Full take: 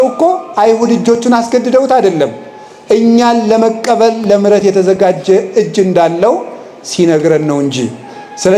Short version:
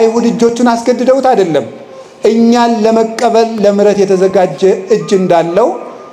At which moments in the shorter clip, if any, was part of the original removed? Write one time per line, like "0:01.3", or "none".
none